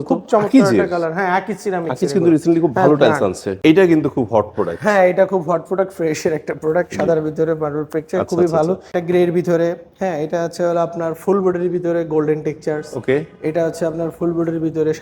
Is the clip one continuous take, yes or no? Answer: no